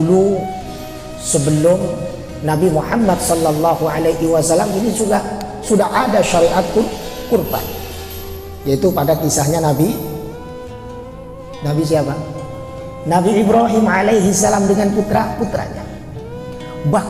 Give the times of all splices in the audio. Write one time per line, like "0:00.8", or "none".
none

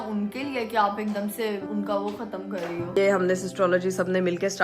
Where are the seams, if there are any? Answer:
0:01.6
0:03.0

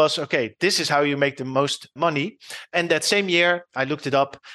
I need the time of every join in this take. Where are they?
0:01.5

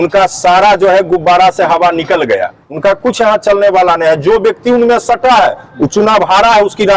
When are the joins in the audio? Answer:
0:02.7

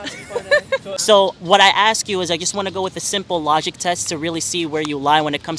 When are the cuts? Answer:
0:00.9

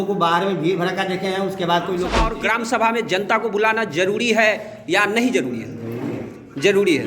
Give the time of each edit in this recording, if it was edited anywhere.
0:02.2

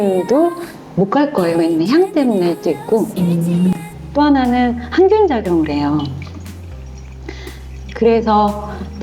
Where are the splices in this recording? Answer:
0:03.7

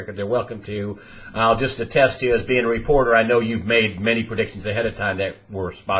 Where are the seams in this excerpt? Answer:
0:05.0

